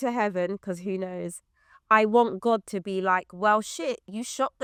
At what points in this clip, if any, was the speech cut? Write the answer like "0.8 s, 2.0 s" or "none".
none